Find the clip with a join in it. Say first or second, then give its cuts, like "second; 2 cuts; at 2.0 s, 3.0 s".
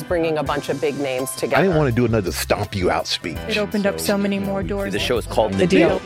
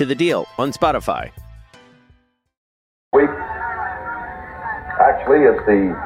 second; 1 cut; at 3.1 s